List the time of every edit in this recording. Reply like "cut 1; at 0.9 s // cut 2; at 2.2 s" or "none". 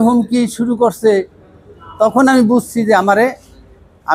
none